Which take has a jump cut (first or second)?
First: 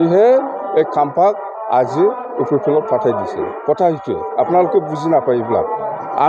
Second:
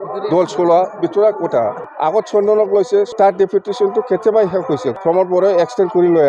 second